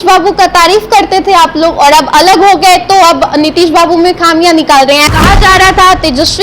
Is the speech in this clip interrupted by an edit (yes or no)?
yes